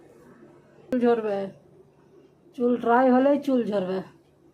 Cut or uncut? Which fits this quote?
cut